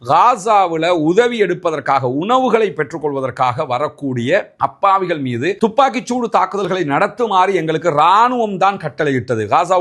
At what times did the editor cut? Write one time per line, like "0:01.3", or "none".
none